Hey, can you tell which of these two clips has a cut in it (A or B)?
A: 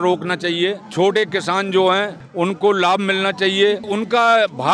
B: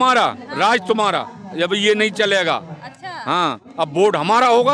A